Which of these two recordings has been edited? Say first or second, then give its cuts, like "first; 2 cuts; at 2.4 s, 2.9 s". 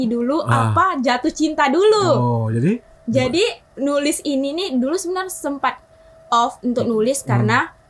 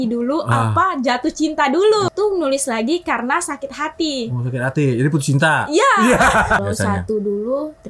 second; 2 cuts; at 2.1 s, 6.6 s